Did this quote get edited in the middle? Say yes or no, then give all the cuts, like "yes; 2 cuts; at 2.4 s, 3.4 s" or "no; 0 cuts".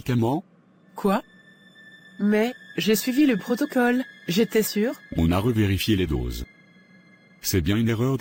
no; 0 cuts